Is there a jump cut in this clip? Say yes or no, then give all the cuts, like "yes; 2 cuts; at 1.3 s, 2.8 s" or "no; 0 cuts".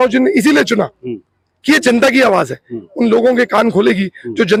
no; 0 cuts